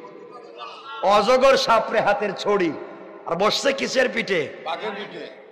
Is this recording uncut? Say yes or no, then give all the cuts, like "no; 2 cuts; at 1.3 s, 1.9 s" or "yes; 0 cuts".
yes; 0 cuts